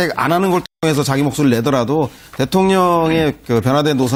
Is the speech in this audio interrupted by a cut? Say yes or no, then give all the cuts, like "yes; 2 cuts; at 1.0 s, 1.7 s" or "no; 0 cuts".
no; 0 cuts